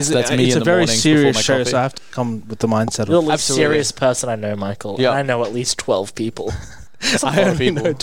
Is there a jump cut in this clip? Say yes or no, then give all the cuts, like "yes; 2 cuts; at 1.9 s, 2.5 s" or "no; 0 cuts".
yes; 1 cut; at 2.0 s